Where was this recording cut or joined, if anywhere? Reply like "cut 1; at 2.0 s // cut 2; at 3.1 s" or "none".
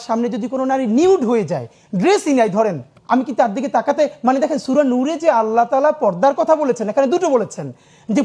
cut 1; at 2.9 s